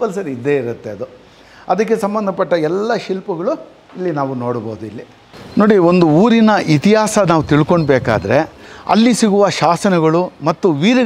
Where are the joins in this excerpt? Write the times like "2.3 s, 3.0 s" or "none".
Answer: none